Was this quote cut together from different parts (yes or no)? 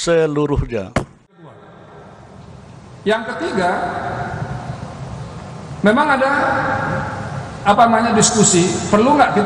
yes